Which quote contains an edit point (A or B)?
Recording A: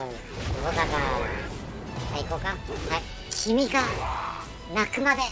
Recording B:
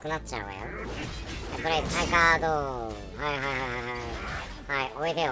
A